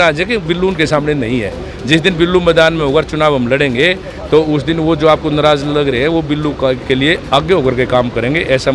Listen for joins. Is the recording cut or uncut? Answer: uncut